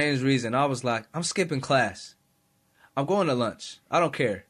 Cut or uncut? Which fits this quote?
uncut